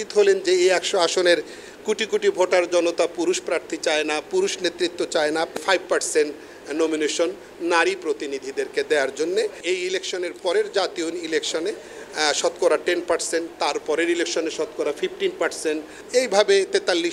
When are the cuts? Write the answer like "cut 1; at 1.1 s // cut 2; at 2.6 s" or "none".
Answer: cut 1; at 5.6 s // cut 2; at 9.6 s // cut 3; at 16.0 s

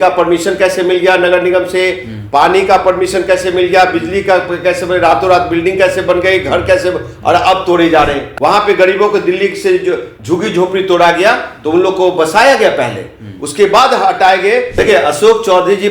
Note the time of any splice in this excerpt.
cut 1; at 8.2 s // cut 2; at 14.7 s

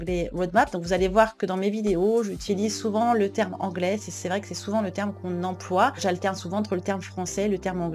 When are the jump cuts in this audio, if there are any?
none

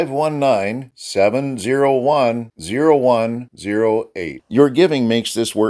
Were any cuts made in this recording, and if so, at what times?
none

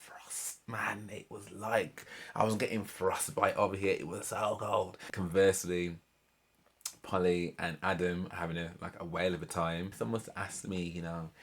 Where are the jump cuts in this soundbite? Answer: cut 1; at 5.1 s // cut 2; at 9.9 s

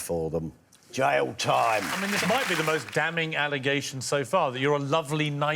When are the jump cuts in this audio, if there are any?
cut 1; at 2.0 s

